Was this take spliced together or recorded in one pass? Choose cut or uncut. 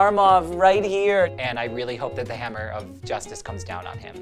cut